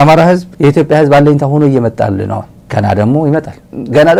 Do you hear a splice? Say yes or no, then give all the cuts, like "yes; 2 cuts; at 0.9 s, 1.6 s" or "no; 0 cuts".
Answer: no; 0 cuts